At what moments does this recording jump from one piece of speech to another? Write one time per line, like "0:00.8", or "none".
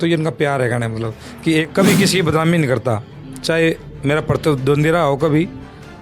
0:01.7